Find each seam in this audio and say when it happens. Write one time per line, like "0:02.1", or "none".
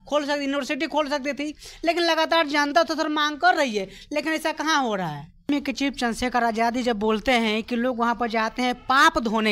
0:05.5

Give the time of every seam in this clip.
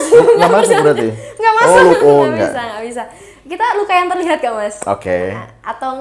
none

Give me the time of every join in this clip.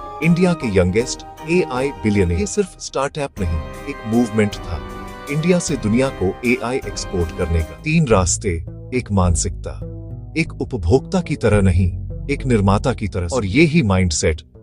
0:02.4
0:07.7
0:13.2

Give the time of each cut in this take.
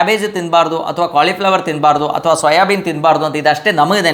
none

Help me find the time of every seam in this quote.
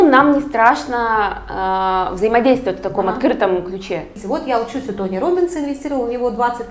0:04.2

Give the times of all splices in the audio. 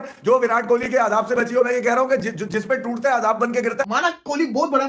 0:03.8

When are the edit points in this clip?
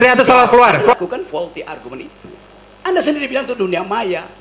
0:00.9

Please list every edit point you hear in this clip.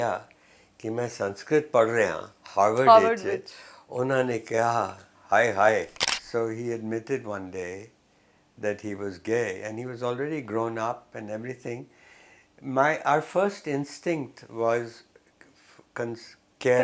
0:06.0

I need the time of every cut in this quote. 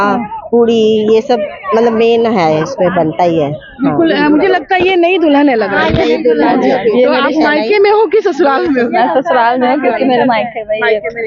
none

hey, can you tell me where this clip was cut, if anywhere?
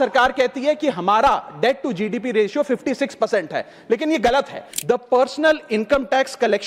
0:04.7

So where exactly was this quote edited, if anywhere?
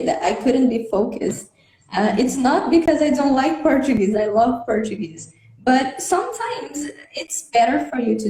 none

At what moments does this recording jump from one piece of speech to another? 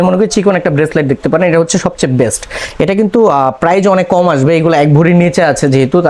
none

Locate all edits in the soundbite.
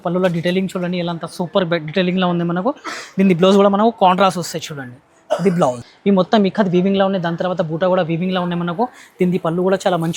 0:05.9

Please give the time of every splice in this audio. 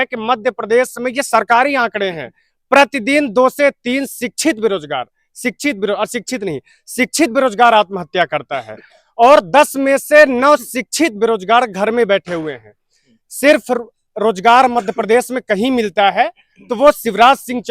none

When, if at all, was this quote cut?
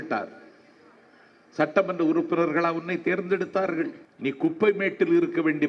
0:04.0

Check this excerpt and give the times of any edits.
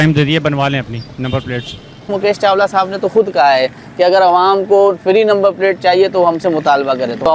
0:02.1

